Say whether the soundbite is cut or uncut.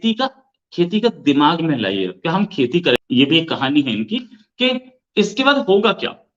uncut